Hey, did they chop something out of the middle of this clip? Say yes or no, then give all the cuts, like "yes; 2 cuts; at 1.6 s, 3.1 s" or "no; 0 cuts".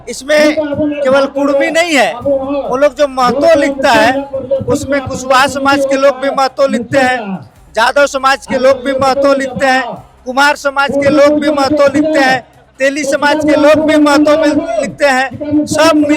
no; 0 cuts